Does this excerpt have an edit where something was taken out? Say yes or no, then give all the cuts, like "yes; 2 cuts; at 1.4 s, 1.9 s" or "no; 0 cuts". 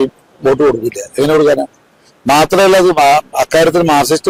no; 0 cuts